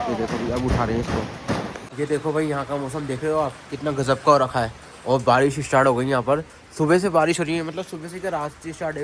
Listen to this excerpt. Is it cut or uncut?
uncut